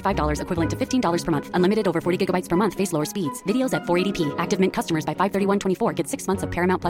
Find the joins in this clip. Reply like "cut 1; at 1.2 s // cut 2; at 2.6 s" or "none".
none

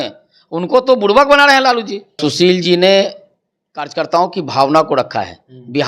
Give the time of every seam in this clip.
cut 1; at 2.1 s

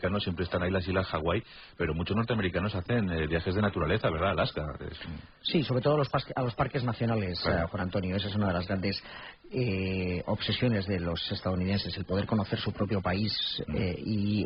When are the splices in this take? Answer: cut 1; at 8.3 s

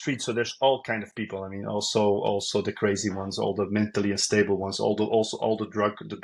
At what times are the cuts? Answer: none

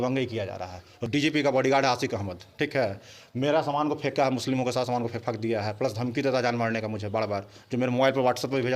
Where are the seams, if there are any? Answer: cut 1; at 1.0 s

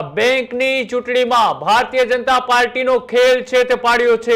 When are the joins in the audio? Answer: none

